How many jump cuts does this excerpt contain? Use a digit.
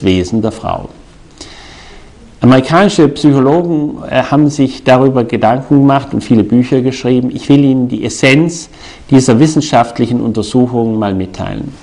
0